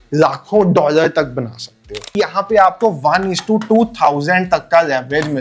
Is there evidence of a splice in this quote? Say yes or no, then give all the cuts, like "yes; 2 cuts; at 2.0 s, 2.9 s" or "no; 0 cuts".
yes; 1 cut; at 2.2 s